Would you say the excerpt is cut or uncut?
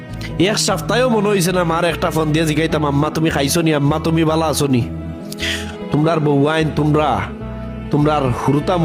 uncut